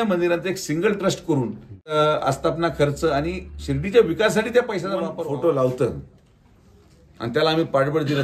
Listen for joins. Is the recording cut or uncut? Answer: cut